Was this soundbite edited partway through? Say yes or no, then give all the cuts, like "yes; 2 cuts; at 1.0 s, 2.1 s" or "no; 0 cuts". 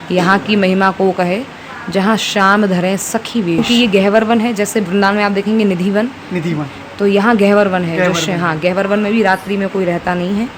yes; 1 cut; at 3.6 s